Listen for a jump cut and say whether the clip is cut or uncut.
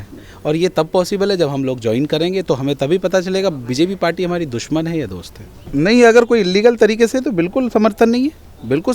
cut